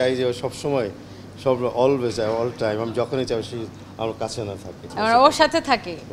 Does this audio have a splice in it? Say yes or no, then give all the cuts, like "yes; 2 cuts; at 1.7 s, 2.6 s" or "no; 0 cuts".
no; 0 cuts